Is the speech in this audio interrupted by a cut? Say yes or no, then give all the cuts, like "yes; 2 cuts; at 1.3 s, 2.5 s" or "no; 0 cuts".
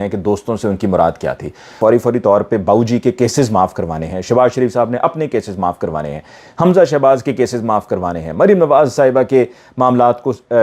yes; 1 cut; at 1.8 s